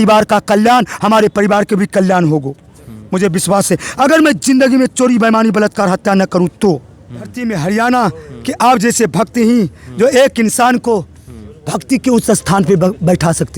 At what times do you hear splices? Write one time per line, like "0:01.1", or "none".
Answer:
0:07.3

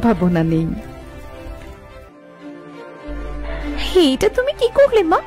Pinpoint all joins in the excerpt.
0:02.1

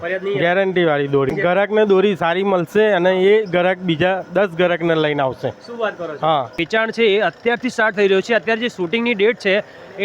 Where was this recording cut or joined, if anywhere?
0:01.3
0:06.6

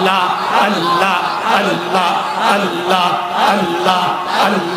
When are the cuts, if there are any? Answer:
none

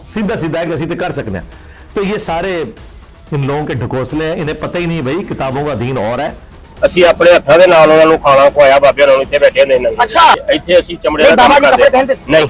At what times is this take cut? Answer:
0:06.4
0:10.4

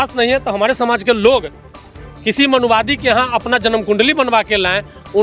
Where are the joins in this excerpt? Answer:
none

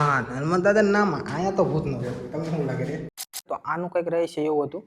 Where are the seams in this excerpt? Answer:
0:03.4

